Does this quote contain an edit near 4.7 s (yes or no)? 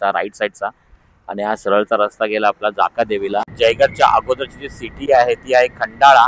no